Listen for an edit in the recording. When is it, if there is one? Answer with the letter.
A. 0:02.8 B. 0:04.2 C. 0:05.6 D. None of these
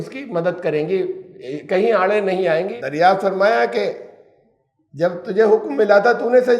A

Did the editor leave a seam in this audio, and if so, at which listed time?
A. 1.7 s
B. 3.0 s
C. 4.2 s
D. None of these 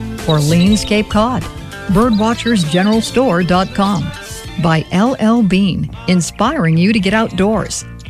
D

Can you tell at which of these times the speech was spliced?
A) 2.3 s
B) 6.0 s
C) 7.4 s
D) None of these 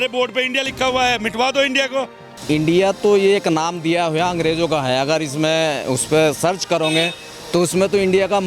A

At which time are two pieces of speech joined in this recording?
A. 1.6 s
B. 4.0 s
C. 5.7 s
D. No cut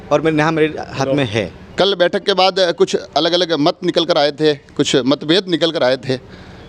A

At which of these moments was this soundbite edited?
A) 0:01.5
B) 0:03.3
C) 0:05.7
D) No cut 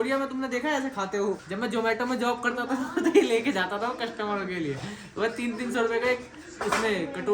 A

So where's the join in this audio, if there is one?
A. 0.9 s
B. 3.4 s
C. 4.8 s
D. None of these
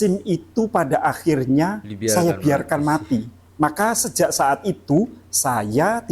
B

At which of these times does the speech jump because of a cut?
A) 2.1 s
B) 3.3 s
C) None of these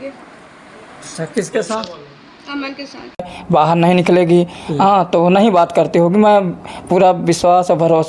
B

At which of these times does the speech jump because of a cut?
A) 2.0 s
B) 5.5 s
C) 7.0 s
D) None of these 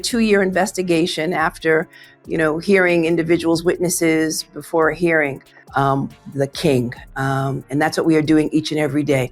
B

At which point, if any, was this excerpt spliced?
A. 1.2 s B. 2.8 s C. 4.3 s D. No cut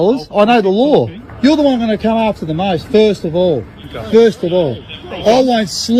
A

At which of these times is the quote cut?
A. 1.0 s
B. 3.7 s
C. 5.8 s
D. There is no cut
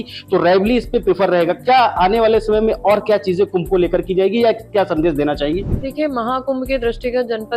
C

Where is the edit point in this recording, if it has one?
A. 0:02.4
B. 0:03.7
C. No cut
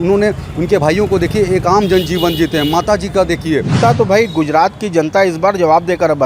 B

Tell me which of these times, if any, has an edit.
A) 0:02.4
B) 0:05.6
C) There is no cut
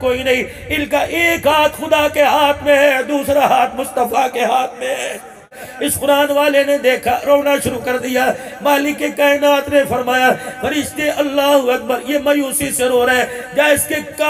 B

